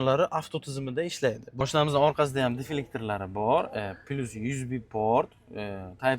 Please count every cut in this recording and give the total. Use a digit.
1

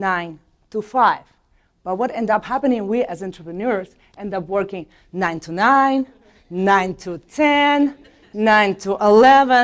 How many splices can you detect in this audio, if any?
0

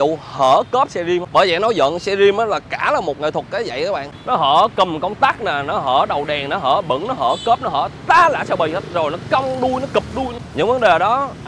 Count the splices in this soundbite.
3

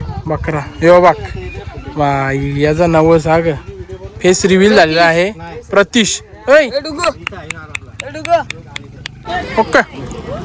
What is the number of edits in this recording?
1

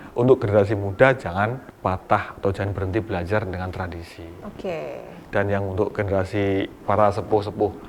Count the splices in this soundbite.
1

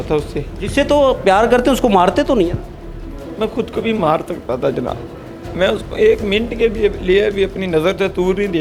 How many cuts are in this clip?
0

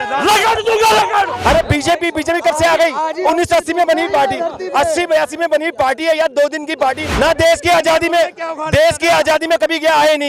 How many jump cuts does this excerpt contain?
2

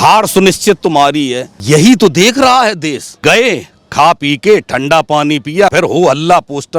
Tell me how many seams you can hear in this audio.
3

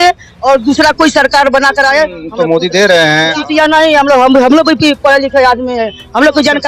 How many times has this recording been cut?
2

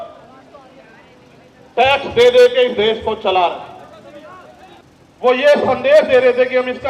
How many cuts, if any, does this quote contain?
1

